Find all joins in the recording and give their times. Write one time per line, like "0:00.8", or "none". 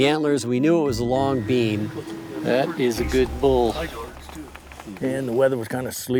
none